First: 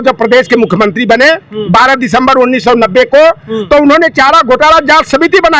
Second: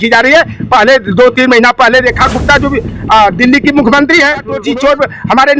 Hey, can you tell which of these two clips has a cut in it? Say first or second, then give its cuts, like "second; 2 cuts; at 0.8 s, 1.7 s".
second; 1 cut; at 4.6 s